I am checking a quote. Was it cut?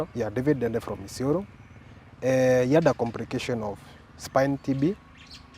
yes; 1 cut; at 1.9 s

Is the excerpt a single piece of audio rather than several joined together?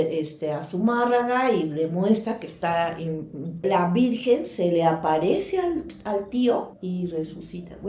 no; 1 cut; at 3.6 s

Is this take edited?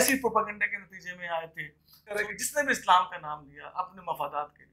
yes; 1 cut; at 2.2 s

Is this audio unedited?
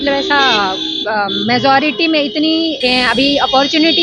no; 1 cut; at 2.8 s

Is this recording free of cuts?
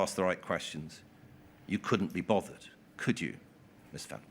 yes; 0 cuts

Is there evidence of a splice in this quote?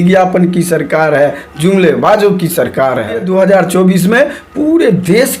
yes; 1 cut; at 3.2 s

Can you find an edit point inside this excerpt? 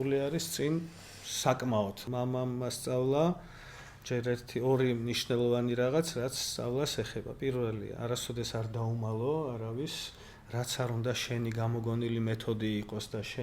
yes; 1 cut; at 2.0 s

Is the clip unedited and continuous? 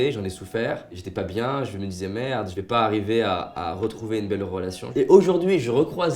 no; 2 cuts; at 1.0 s, 4.8 s

